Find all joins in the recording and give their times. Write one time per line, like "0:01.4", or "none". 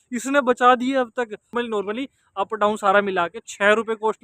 0:01.5